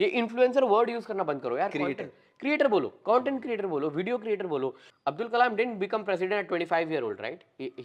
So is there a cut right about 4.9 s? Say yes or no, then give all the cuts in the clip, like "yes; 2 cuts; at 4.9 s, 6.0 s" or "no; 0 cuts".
yes; 1 cut; at 4.9 s